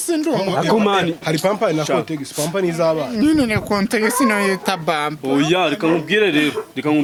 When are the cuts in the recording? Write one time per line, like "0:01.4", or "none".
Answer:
none